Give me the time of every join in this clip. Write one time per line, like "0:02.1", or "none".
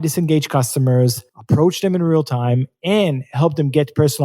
0:01.3